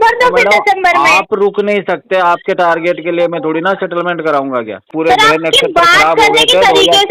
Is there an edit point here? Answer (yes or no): yes